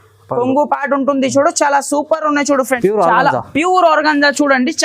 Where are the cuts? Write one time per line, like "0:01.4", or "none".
0:02.7